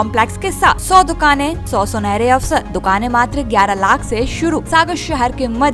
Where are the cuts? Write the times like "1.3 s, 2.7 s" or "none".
0.8 s, 1.6 s, 2.7 s, 4.6 s